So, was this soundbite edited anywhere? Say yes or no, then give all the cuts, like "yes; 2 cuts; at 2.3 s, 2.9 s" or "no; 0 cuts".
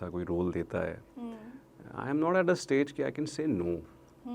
no; 0 cuts